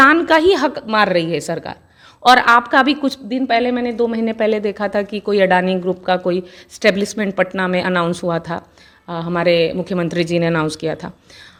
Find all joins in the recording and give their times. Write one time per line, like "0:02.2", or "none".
none